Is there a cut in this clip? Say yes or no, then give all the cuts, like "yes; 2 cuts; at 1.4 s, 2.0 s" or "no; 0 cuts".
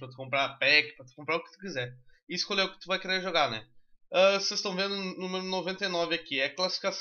yes; 1 cut; at 3.4 s